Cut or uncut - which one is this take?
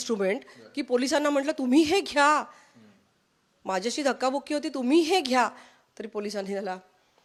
uncut